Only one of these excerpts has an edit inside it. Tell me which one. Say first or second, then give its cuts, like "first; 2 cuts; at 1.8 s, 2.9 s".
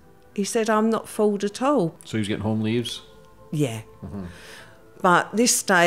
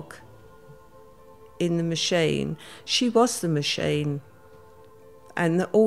first; 1 cut; at 1.9 s